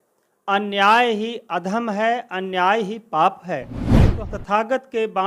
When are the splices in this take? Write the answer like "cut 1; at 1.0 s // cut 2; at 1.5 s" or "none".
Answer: cut 1; at 4.0 s

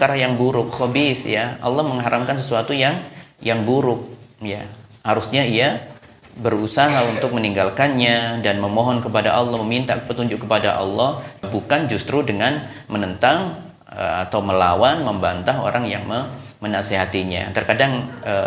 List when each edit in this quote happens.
cut 1; at 11.5 s

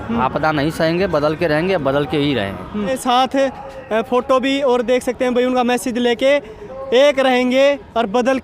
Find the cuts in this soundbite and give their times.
cut 1; at 3.0 s

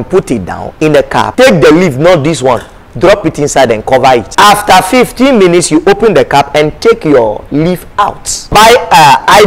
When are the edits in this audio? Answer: cut 1; at 1.3 s // cut 2; at 4.3 s // cut 3; at 8.5 s

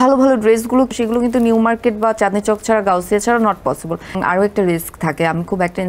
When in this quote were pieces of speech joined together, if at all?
cut 1; at 0.9 s // cut 2; at 4.2 s

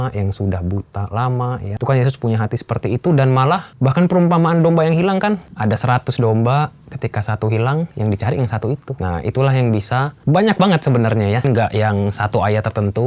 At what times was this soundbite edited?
cut 1; at 1.7 s // cut 2; at 3.7 s // cut 3; at 5.5 s // cut 4; at 8.9 s // cut 5; at 10.1 s // cut 6; at 11.4 s

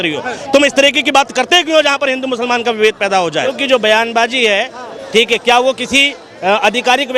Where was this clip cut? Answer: cut 1; at 3.5 s

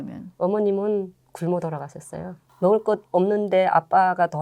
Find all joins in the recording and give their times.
cut 1; at 2.4 s

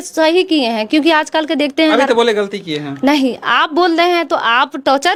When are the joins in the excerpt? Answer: none

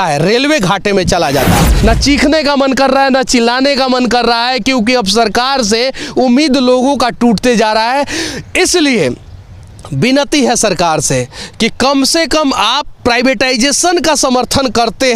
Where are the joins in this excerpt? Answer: cut 1; at 1.7 s

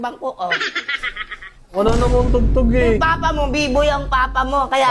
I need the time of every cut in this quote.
none

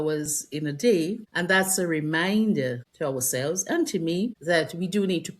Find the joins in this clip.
cut 1; at 1.3 s // cut 2; at 2.9 s // cut 3; at 4.4 s

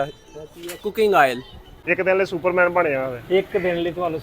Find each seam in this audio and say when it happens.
cut 1; at 1.8 s

